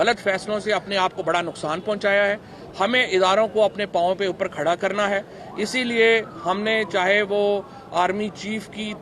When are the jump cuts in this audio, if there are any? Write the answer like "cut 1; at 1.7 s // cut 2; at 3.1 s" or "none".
none